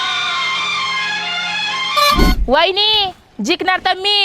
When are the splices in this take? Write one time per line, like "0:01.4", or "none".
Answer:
0:02.3